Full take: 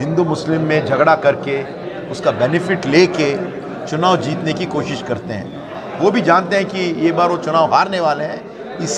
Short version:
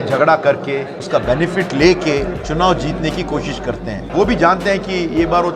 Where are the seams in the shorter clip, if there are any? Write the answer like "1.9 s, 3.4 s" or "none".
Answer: 1.0 s, 2.4 s, 4.0 s